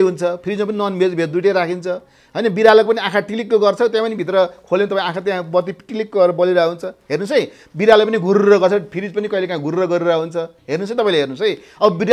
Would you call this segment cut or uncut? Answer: uncut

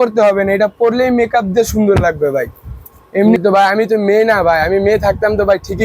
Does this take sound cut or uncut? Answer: cut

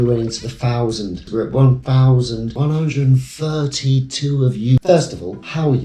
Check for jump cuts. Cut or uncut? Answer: cut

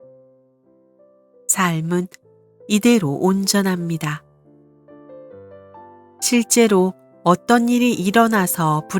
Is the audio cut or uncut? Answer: cut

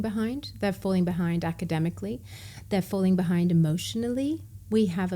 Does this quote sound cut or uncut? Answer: uncut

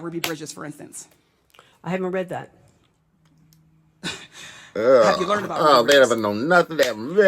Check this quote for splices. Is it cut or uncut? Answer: uncut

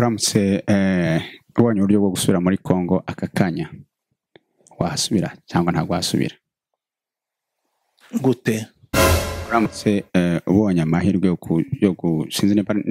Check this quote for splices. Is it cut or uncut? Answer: uncut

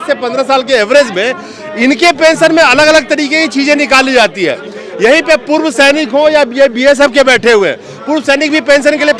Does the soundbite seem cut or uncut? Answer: uncut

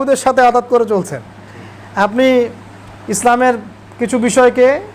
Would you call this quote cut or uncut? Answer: uncut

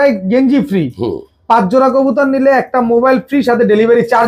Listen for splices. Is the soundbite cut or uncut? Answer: uncut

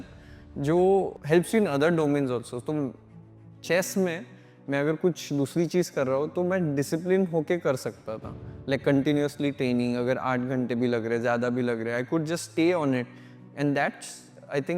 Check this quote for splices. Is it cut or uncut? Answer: cut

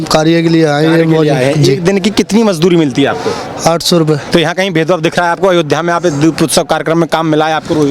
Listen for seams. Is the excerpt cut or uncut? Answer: cut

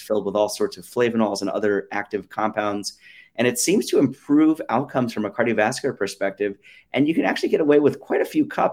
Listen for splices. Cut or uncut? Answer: uncut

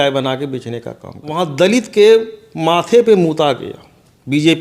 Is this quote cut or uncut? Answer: cut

